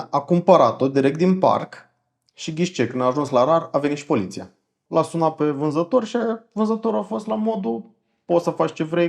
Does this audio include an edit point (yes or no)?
yes